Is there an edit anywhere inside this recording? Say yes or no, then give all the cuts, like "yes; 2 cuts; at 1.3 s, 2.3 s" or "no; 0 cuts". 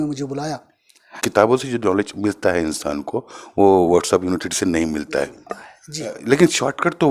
yes; 1 cut; at 1.3 s